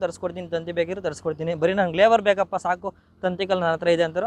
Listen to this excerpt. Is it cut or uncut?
uncut